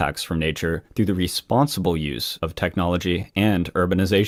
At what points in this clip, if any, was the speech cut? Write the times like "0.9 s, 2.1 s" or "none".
none